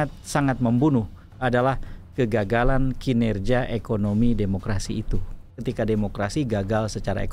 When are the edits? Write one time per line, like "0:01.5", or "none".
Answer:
0:05.5